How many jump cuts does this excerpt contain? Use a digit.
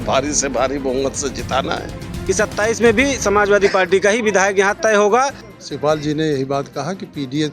2